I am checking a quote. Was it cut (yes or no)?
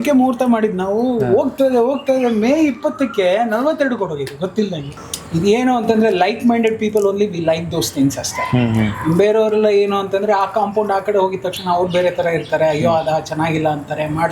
yes